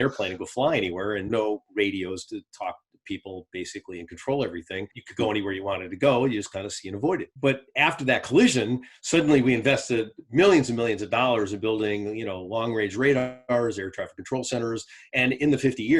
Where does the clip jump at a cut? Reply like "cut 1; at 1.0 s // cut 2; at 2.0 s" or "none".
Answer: cut 1; at 1.3 s // cut 2; at 4.9 s // cut 3; at 7.3 s